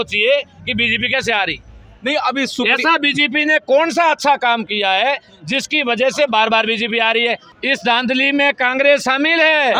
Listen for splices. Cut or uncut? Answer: cut